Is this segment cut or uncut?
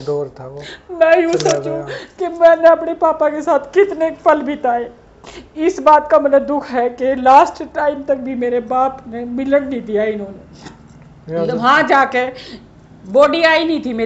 uncut